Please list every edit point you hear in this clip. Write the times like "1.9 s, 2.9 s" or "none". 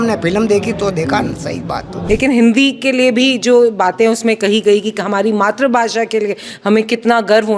1.9 s